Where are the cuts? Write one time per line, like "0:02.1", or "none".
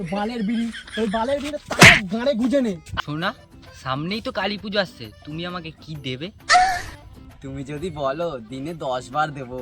0:02.9

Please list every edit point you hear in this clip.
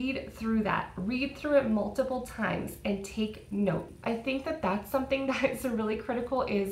0:03.9

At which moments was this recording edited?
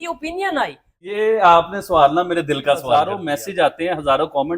0:01.0
0:03.1

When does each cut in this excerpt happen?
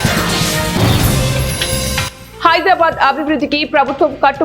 none

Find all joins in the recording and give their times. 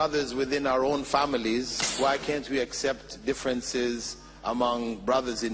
0:01.8

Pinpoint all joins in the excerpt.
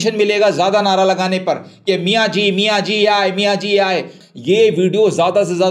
0:04.2

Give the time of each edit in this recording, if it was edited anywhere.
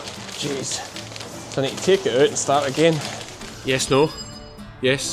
0:03.5

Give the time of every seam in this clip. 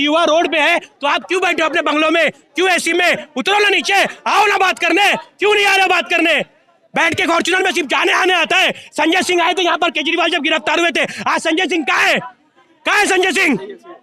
none

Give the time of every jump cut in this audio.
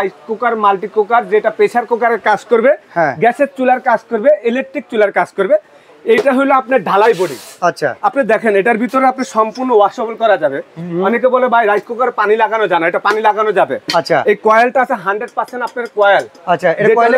none

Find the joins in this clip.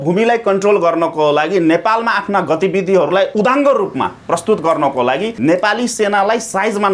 0:03.3
0:05.3

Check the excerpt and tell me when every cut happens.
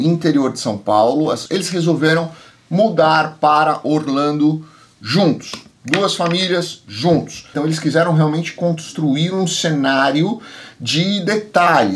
0:01.4
0:07.5

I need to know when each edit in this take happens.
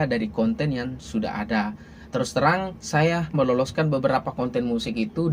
0:03.3

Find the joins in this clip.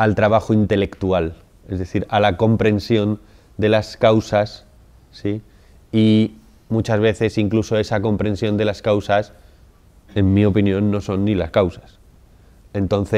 none

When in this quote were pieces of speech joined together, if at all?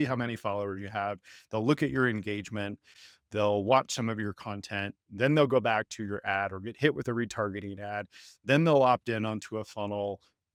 none

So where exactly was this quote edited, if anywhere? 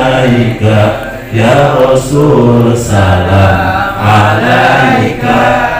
none

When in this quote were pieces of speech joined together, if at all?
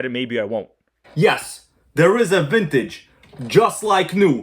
0:01.0

